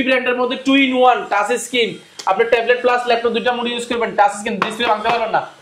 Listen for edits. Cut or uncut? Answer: uncut